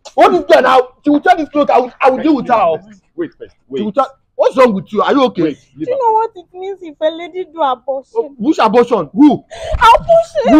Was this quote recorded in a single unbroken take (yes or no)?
yes